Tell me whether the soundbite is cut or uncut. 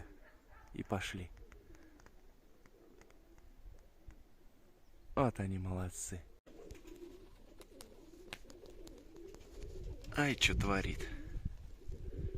cut